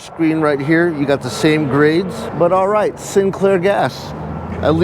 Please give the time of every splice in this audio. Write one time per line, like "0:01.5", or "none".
0:02.2